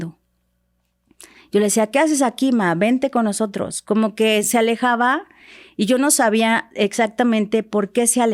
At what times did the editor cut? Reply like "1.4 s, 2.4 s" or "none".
none